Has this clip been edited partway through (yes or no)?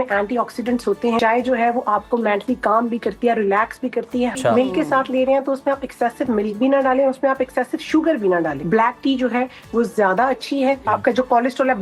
yes